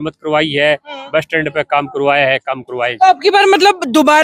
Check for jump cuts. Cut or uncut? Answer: uncut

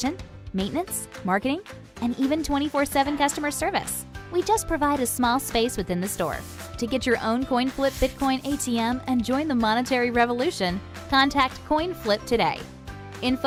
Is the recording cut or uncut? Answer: uncut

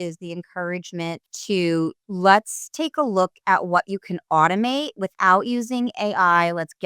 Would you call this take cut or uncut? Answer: cut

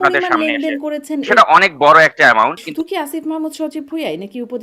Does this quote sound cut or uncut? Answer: cut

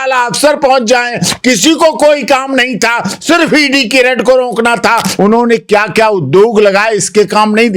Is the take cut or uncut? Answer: cut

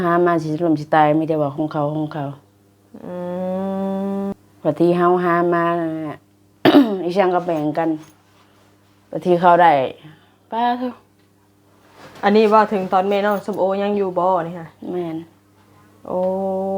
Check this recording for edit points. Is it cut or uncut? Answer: cut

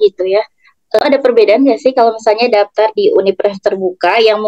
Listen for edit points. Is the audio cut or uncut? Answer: cut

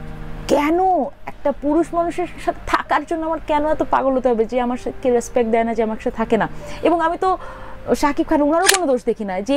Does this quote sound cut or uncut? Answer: uncut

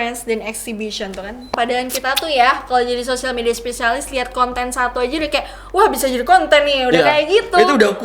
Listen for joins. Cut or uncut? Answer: cut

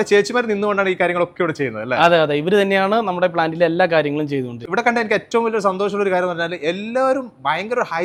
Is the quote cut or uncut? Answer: uncut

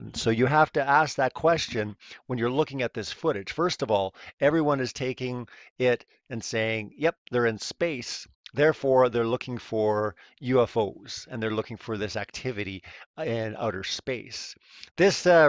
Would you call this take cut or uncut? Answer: uncut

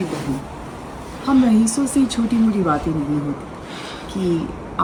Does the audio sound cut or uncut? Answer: uncut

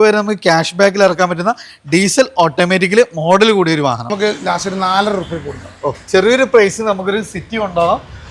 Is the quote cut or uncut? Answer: cut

